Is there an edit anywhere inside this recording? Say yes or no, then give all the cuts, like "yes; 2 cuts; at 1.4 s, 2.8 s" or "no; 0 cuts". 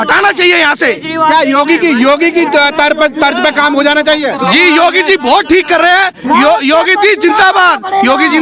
no; 0 cuts